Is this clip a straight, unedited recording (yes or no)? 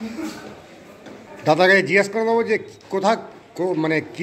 no